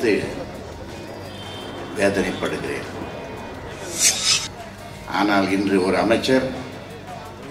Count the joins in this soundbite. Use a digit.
1